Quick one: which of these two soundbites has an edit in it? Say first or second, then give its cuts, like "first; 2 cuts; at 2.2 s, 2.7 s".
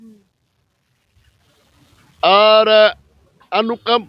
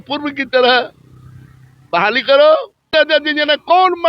second; 1 cut; at 2.9 s